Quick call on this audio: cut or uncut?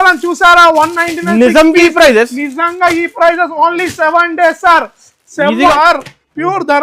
cut